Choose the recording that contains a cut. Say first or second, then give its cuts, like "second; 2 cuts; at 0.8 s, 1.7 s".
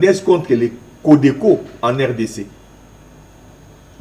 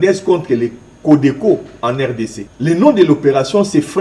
second; 1 cut; at 2.4 s